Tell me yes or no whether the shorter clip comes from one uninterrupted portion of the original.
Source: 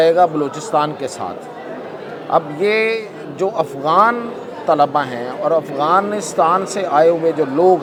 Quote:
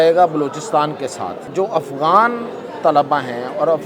no